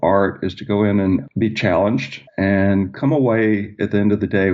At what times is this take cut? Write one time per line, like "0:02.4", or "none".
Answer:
0:01.3

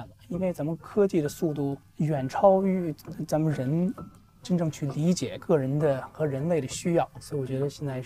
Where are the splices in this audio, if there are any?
0:01.8
0:05.4

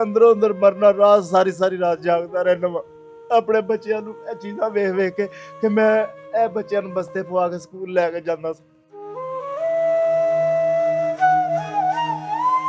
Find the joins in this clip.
none

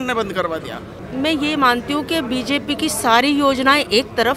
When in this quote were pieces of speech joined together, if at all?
0:01.0

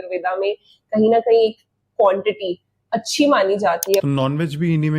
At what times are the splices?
0:04.0

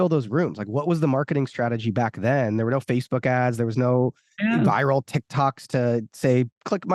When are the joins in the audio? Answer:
none

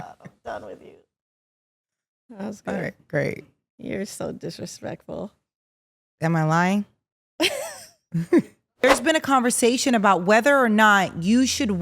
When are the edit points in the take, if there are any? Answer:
0:08.8

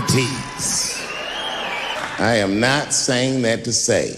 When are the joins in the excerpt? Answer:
0:01.9

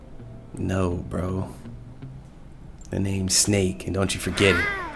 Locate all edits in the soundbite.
none

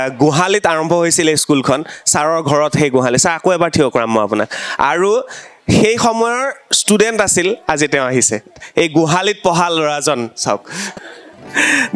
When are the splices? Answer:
none

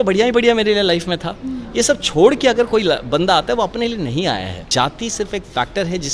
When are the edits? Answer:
0:04.6

